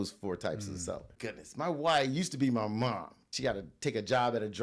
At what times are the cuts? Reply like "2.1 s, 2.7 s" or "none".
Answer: 1.1 s, 3.2 s

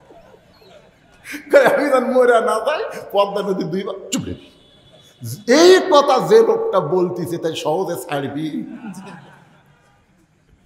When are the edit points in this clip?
none

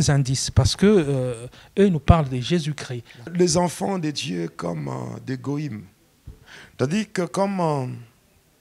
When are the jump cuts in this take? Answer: 3.3 s

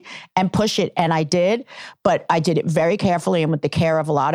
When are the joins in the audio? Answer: none

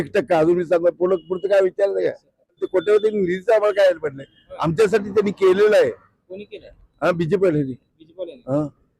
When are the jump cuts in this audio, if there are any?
2.6 s

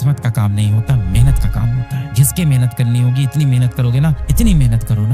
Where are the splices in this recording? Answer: 2.1 s

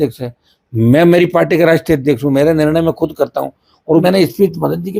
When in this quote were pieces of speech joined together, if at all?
4.0 s

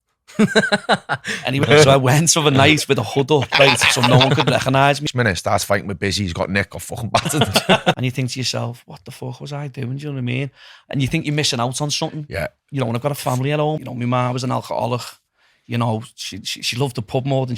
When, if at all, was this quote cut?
1.7 s, 5.1 s, 8.0 s, 13.8 s

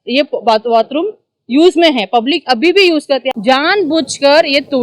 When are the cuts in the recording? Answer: 3.3 s

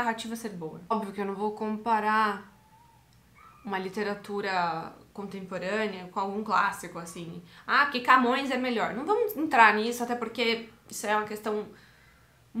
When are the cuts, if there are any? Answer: 0.9 s

